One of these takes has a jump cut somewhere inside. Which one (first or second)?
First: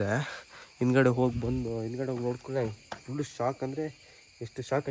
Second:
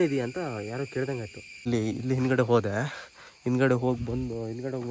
second